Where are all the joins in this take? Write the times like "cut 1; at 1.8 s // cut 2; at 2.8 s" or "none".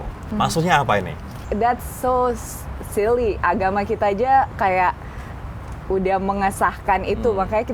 cut 1; at 1.5 s